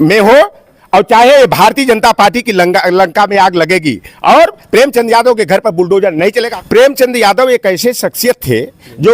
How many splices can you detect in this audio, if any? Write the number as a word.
one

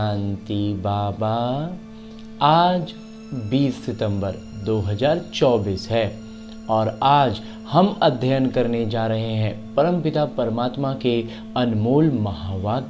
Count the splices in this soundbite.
zero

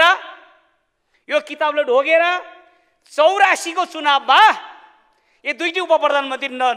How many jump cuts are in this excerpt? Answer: zero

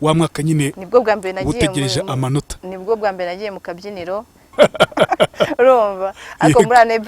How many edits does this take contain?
one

